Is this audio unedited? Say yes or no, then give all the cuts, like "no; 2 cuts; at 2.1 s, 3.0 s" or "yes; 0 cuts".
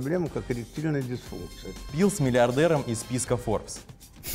no; 1 cut; at 1.8 s